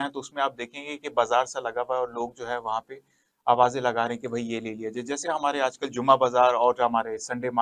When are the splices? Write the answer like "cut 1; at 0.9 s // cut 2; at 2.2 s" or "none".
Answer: none